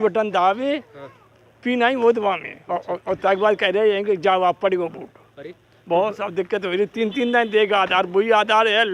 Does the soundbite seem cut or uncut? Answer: uncut